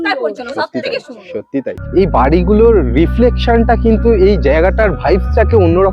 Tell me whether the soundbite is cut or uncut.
cut